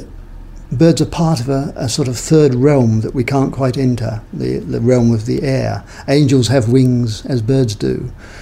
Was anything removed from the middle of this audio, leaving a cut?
no; 0 cuts

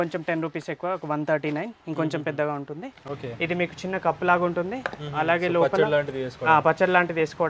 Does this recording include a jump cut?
yes; 1 cut; at 3.0 s

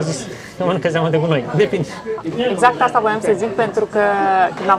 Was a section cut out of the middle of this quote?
no; 0 cuts

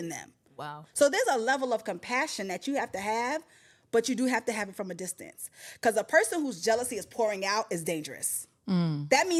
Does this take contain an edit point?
no; 0 cuts

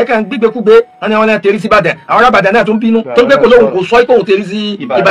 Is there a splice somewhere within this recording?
no; 0 cuts

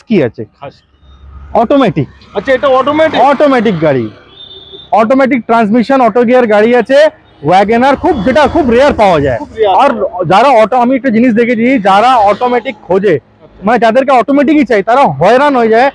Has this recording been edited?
no; 0 cuts

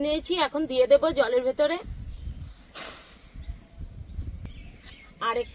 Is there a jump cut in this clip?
no; 0 cuts

